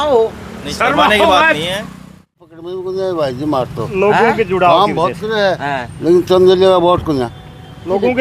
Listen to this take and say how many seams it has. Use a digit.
1